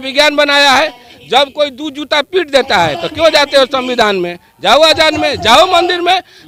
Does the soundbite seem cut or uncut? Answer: uncut